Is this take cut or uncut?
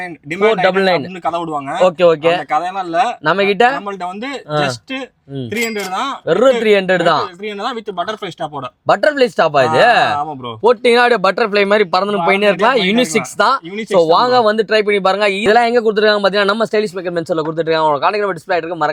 uncut